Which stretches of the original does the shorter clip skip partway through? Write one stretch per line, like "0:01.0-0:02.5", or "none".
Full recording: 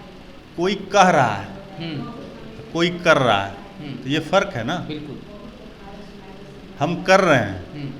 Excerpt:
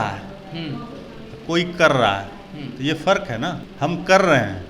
0:04.9-0:06.6